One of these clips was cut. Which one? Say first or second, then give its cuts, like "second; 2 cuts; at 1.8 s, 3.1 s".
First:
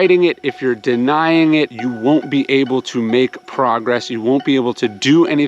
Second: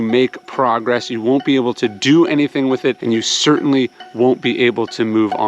first; 1 cut; at 1.8 s